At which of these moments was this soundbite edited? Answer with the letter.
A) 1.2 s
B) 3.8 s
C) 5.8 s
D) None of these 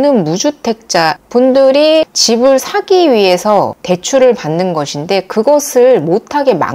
A